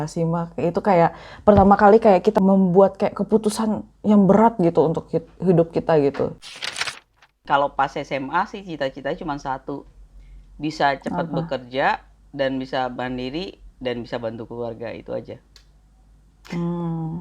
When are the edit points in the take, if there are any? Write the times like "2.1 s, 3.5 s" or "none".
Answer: 2.3 s, 6.9 s